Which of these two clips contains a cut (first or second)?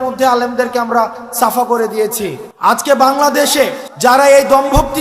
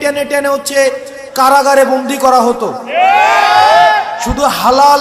first